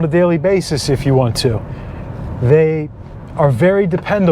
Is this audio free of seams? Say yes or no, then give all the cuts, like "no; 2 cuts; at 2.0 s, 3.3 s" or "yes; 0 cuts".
yes; 0 cuts